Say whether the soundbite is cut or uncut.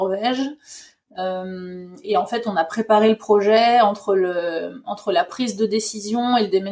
uncut